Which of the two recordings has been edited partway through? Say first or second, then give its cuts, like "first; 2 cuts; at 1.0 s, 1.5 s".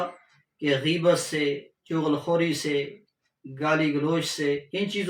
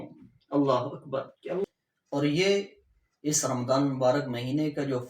second; 1 cut; at 1.6 s